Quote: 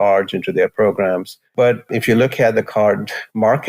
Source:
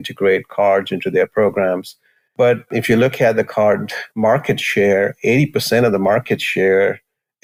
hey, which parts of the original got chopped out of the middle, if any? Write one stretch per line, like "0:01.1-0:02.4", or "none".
0:01.9-0:02.2